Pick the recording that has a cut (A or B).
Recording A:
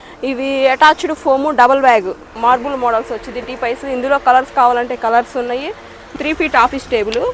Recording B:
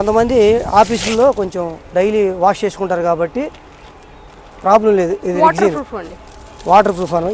A